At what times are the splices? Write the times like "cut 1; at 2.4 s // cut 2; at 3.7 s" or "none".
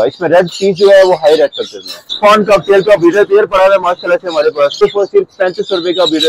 cut 1; at 2.1 s // cut 2; at 4.8 s